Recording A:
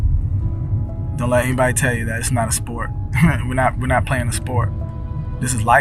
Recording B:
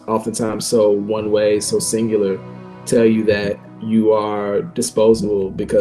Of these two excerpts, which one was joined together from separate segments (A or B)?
B